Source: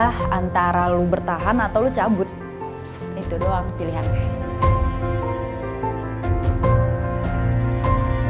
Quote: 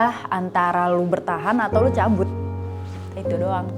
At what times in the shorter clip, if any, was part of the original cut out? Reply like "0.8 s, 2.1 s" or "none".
none